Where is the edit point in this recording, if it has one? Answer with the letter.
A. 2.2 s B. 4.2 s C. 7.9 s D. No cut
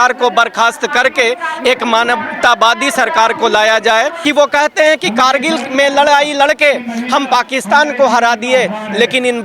B